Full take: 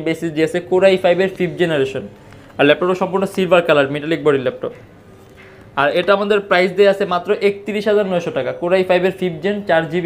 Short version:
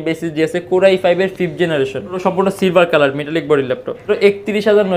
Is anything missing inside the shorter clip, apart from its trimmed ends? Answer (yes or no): yes